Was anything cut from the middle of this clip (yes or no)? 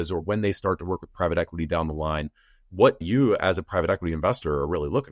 yes